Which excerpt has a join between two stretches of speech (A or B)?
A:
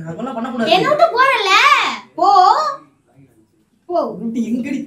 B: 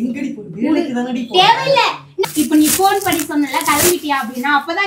B